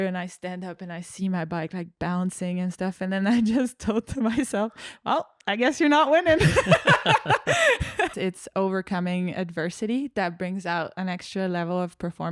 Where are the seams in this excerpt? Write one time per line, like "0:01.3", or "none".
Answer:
0:08.1